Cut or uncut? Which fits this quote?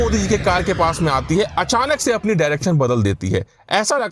uncut